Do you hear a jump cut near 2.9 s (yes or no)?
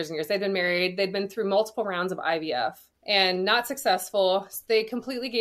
yes